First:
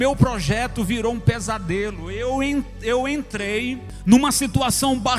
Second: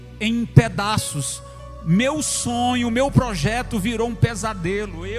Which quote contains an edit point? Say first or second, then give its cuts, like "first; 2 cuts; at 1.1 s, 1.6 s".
first; 1 cut; at 3.9 s